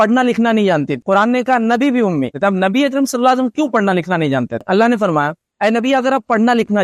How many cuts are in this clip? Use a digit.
3